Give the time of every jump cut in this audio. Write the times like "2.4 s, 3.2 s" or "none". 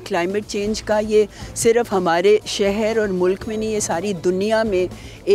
none